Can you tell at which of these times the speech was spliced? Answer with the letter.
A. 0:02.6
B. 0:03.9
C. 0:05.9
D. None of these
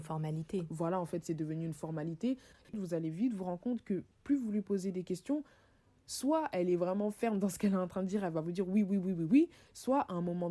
A